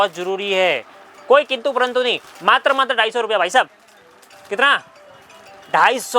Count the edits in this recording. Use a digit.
1